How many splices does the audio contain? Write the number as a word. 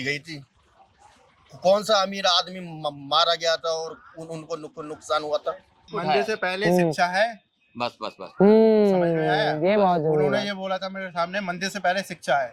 one